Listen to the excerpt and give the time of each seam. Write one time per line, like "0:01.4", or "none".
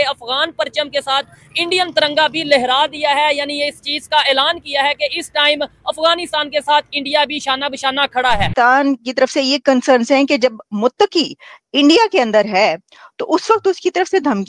0:08.5